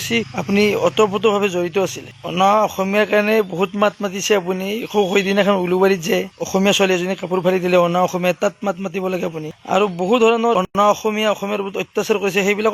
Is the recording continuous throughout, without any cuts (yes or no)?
no